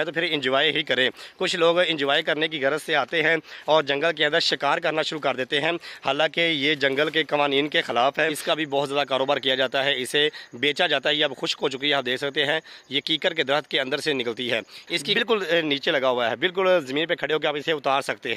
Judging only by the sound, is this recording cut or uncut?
cut